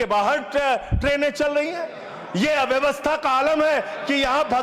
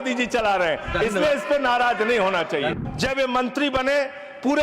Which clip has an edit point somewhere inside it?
second; 1 cut; at 2.7 s

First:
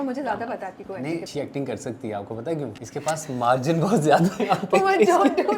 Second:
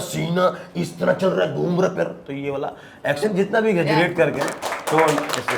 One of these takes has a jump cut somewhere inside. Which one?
first; 2 cuts; at 1.3 s, 2.8 s

